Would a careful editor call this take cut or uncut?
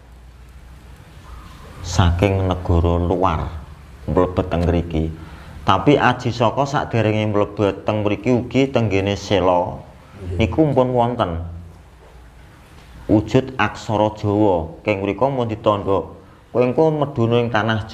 uncut